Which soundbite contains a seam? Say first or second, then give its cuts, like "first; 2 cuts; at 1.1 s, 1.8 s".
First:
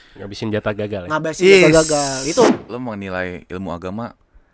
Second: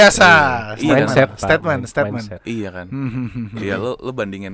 first; 1 cut; at 2.6 s